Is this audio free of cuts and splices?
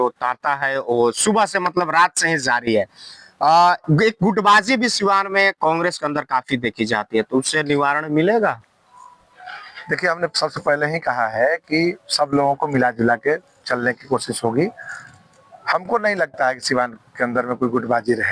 yes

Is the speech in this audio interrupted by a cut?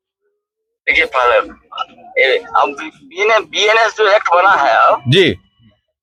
no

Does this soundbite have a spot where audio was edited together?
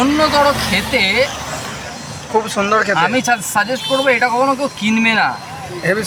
no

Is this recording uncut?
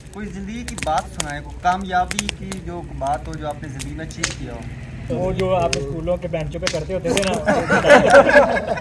no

